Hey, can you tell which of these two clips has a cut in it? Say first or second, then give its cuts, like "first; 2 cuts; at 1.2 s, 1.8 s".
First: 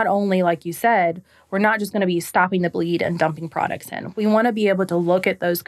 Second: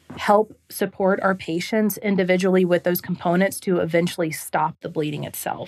second; 1 cut; at 4.8 s